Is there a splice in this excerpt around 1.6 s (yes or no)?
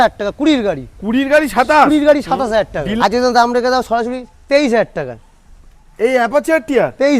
no